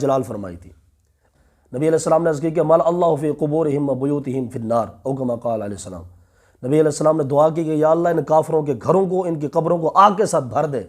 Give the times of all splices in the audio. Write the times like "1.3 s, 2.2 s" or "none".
1.2 s